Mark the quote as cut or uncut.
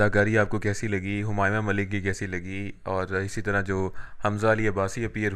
uncut